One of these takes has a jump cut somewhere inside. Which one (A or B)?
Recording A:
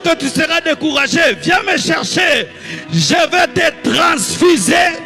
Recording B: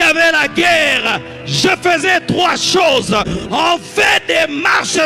B